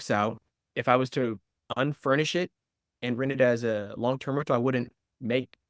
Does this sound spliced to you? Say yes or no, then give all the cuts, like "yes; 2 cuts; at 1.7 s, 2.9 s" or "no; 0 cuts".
no; 0 cuts